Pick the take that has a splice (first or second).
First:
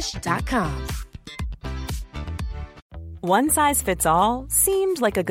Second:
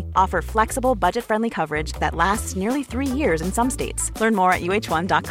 first